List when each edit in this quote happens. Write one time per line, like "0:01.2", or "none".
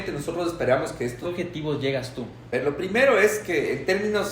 0:01.3